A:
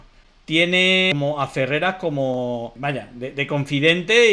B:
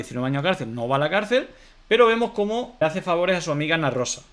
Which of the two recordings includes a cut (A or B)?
A